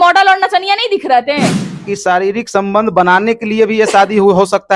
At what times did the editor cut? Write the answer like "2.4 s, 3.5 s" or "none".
1.8 s